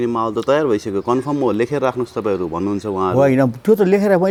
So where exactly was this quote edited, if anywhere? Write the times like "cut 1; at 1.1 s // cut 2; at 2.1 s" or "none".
none